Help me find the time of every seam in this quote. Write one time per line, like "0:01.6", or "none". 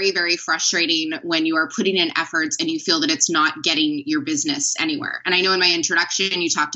none